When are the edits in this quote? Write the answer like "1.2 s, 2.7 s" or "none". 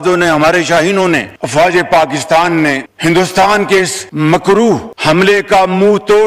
1.4 s